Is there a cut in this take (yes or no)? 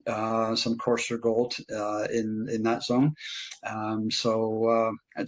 no